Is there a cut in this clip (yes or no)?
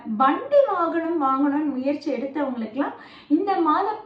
no